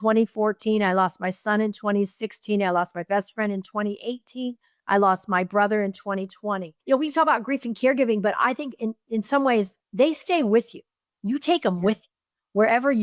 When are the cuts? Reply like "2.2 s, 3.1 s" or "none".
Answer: 6.7 s, 9.8 s